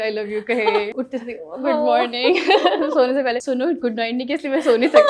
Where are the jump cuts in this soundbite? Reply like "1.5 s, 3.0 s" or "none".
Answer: 0.9 s, 3.4 s